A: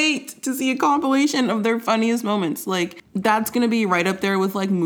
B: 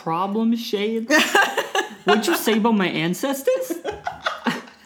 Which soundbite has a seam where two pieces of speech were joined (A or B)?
A